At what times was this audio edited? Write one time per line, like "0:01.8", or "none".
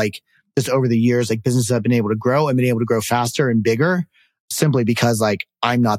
none